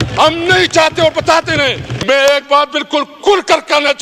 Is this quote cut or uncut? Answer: cut